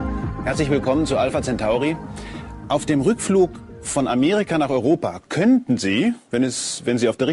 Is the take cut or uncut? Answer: uncut